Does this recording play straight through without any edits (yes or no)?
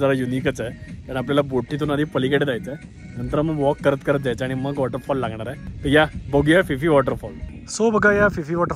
yes